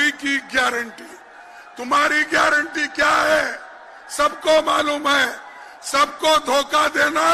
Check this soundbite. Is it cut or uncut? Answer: uncut